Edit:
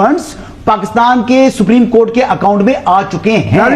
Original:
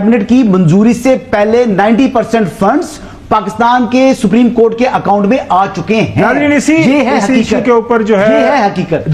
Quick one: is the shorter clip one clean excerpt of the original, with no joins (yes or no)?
yes